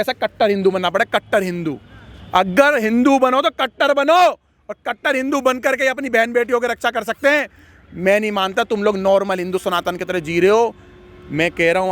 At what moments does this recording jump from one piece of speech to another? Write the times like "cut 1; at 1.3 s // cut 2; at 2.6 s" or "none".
none